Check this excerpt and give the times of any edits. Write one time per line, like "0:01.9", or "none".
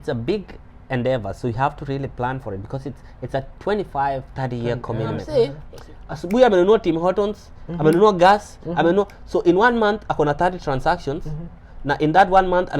0:05.2